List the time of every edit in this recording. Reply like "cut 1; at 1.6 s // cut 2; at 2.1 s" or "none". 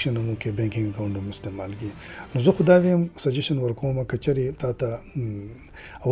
none